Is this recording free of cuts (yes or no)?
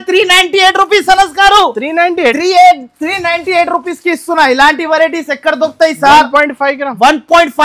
yes